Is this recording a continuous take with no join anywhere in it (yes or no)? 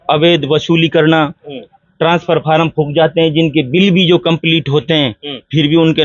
yes